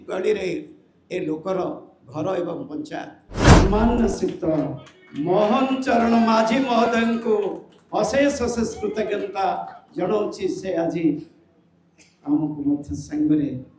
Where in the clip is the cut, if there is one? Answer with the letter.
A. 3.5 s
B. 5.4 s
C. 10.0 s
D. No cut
A